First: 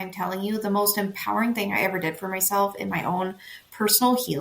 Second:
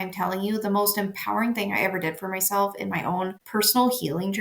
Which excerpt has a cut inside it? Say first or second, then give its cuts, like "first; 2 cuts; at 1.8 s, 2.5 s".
second; 1 cut; at 3.4 s